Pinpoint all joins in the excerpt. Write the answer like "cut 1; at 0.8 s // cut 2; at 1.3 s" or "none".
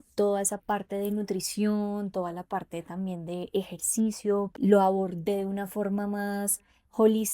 cut 1; at 4.5 s